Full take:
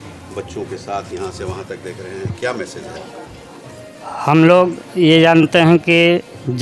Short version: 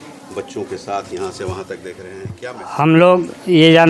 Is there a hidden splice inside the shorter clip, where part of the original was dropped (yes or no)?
yes